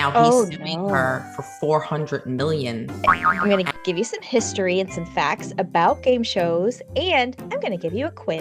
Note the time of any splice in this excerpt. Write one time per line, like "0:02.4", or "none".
0:02.9